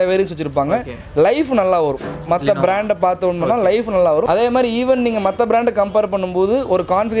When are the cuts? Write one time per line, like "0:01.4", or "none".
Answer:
0:04.3